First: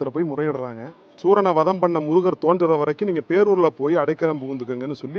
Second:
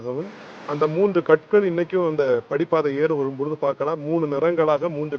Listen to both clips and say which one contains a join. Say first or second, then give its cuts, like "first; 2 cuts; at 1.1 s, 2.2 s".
first; 1 cut; at 1.1 s